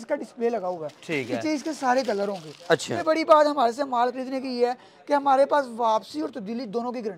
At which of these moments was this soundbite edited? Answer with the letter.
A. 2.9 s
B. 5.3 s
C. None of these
A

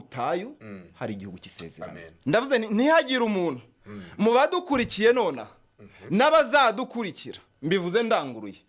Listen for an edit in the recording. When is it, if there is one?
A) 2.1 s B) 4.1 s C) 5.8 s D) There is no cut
A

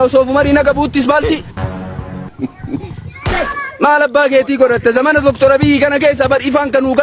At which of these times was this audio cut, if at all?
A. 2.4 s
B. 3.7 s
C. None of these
C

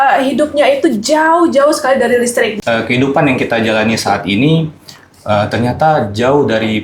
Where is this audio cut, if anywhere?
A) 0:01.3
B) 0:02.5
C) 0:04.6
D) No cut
B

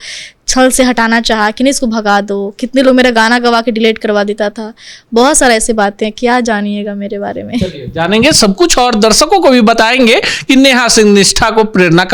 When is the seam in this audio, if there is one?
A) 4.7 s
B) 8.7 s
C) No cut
C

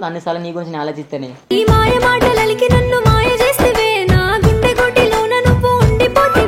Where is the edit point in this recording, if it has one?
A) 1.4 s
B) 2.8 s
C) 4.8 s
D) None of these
A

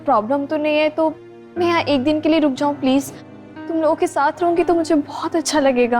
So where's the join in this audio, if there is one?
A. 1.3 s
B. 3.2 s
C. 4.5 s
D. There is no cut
D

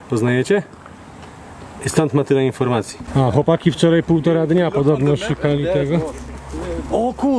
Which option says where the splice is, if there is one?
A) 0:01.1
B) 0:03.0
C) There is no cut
B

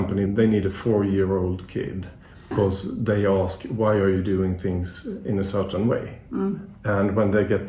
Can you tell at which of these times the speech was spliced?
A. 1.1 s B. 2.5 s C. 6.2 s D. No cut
B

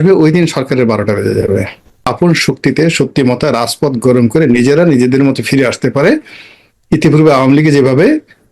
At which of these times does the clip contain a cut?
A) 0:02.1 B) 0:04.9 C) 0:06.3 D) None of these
A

